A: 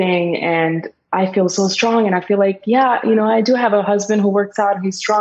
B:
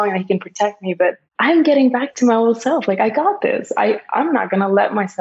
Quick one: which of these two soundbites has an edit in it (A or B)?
B